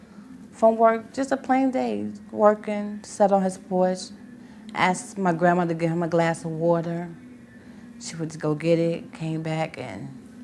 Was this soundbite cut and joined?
no; 0 cuts

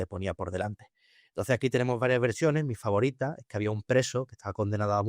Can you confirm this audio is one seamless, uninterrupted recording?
yes; 0 cuts

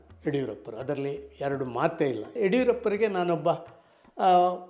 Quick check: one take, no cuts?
no; 1 cut; at 2.3 s

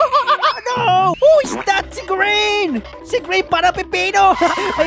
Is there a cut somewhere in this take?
yes; 1 cut; at 1.2 s

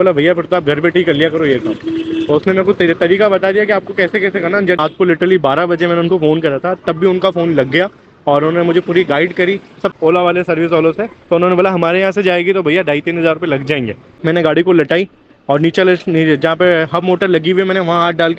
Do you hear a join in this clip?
yes; 3 cuts; at 4.8 s, 9.9 s, 14.2 s

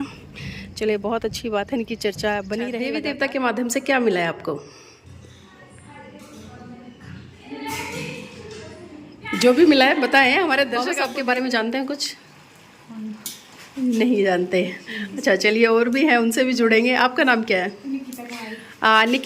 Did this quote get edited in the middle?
yes; 2 cuts; at 3.0 s, 11.0 s

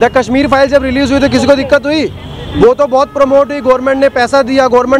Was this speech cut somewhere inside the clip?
no; 0 cuts

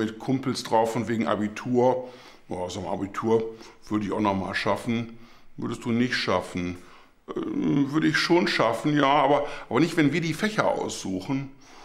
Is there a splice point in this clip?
no; 0 cuts

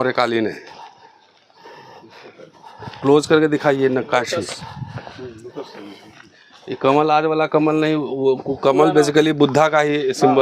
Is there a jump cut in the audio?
no; 0 cuts

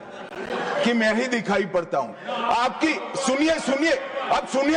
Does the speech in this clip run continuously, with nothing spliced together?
yes; 0 cuts

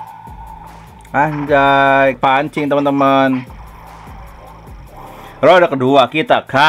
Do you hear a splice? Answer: yes; 1 cut; at 2.2 s

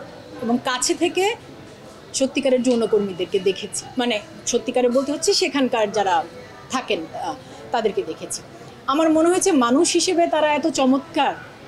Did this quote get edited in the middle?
no; 0 cuts

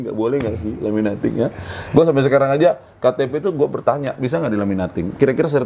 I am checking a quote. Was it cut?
no; 0 cuts

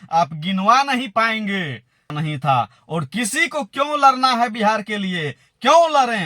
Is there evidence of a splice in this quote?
yes; 1 cut; at 2.1 s

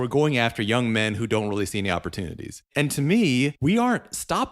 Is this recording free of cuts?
no; 2 cuts; at 2.7 s, 3.6 s

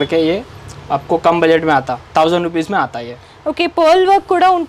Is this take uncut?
yes; 0 cuts

